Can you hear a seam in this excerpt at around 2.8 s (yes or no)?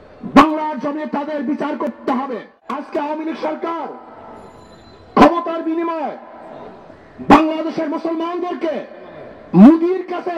yes